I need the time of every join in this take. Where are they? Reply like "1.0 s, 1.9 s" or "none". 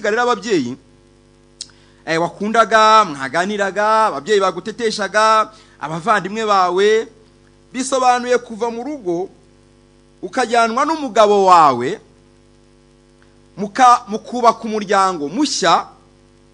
none